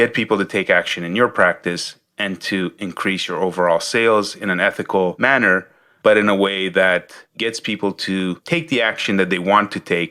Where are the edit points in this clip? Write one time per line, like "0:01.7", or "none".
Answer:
none